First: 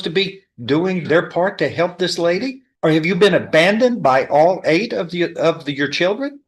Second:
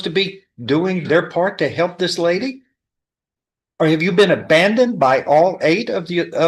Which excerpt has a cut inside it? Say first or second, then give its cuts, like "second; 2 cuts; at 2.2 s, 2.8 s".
first; 1 cut; at 2.6 s